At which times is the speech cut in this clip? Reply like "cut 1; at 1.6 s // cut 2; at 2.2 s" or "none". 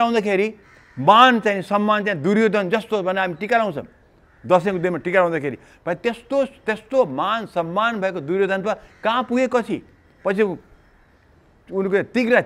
none